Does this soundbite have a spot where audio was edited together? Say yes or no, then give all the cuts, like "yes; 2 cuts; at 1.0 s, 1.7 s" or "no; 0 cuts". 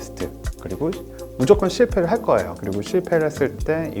yes; 1 cut; at 2.6 s